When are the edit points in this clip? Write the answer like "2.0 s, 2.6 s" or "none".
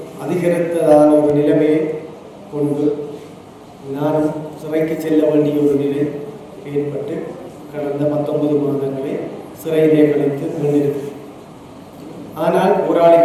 none